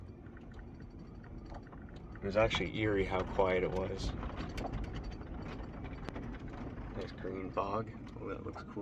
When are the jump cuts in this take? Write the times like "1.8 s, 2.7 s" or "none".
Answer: none

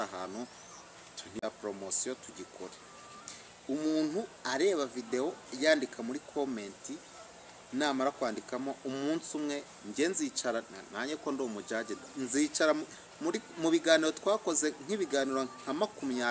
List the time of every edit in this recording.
1.4 s

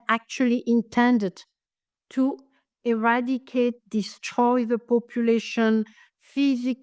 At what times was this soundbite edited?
none

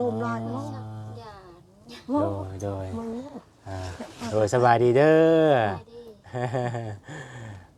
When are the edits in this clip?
none

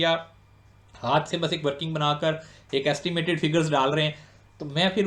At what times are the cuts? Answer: none

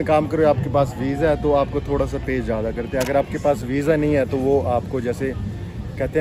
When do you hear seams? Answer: none

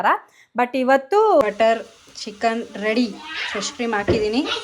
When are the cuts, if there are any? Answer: 1.4 s

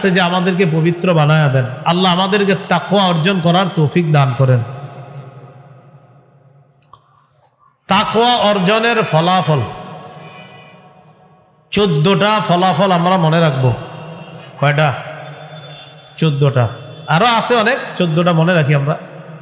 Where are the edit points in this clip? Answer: none

